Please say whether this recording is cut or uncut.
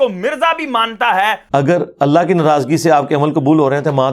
cut